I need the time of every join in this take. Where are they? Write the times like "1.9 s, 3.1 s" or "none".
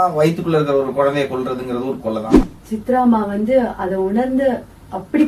2.3 s